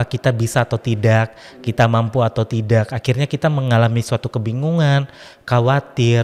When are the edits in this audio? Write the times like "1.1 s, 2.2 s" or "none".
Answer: none